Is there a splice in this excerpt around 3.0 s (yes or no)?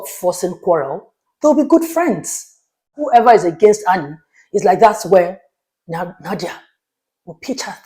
yes